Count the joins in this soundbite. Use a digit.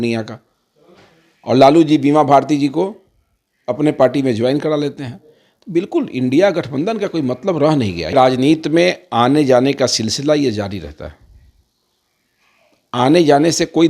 1